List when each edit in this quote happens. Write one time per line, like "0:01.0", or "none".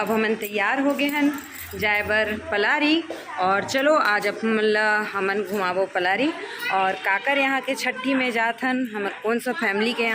none